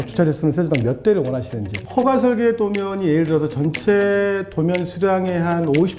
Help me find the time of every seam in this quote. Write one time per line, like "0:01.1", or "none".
0:01.8